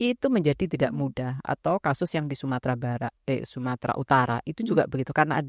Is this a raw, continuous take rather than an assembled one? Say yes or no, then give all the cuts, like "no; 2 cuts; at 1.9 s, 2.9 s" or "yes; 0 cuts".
yes; 0 cuts